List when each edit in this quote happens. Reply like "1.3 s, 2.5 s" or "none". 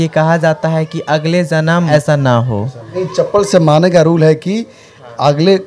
1.9 s, 2.9 s